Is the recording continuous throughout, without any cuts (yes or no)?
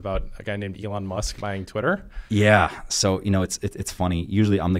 yes